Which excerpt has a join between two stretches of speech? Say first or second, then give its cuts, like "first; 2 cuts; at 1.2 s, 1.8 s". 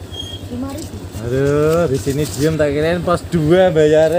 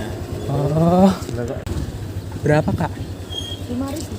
second; 1 cut; at 1.7 s